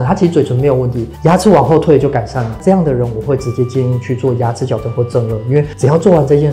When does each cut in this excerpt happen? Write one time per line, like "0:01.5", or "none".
none